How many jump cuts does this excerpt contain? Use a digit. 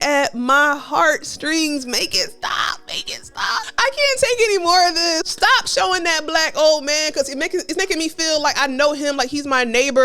2